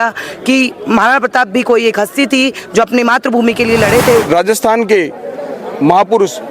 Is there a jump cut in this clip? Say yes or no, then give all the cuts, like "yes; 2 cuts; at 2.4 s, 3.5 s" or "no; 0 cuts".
yes; 1 cut; at 4.2 s